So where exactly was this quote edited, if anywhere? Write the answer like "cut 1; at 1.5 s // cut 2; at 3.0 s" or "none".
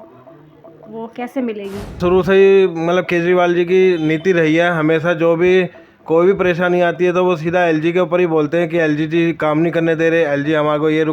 cut 1; at 1.9 s